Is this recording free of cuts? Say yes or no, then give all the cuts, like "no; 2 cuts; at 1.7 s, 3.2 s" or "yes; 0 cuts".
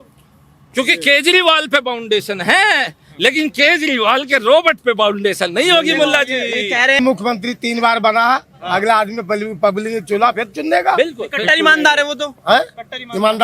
no; 1 cut; at 7.0 s